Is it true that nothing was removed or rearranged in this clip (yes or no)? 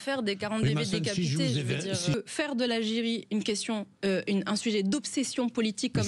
no